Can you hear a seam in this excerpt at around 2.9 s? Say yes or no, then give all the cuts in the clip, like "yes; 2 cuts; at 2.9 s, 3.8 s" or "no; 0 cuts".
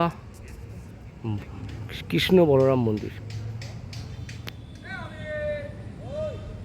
no; 1 cut; at 4.6 s